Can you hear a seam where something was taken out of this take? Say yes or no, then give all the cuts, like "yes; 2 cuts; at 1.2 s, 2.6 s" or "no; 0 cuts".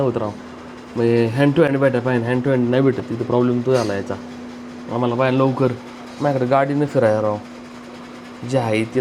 no; 0 cuts